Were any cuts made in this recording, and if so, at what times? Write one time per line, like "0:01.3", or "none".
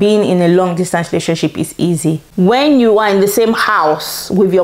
0:02.3